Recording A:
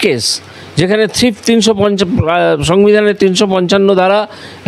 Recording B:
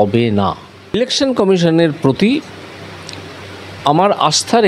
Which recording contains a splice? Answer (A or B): B